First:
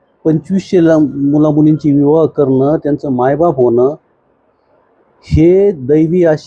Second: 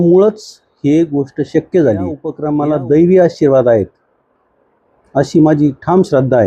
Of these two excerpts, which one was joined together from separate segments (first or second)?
second